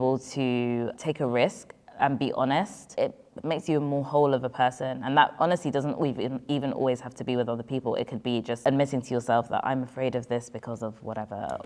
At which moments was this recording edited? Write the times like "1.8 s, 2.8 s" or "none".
0.9 s, 2.8 s, 8.6 s